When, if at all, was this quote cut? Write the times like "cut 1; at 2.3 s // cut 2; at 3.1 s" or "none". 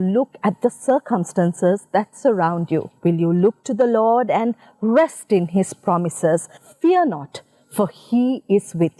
cut 1; at 2.9 s // cut 2; at 6.6 s